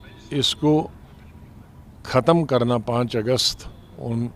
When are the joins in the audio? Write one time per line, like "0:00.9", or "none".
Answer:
none